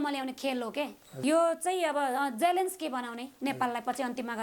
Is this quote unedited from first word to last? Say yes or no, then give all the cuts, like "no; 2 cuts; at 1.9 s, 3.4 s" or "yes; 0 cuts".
no; 1 cut; at 1.2 s